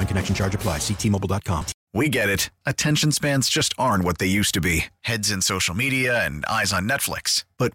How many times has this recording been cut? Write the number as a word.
one